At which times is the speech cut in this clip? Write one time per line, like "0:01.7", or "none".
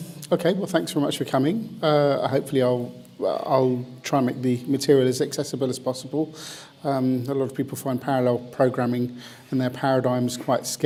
none